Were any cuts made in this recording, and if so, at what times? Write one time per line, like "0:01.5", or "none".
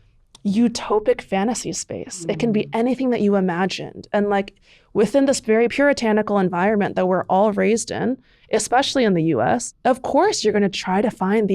0:09.7